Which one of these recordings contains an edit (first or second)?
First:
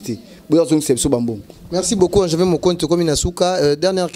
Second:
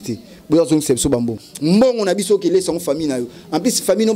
second